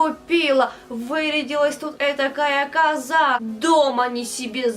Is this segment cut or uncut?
cut